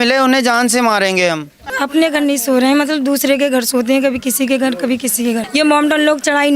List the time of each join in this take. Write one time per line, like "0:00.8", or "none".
0:01.8
0:05.5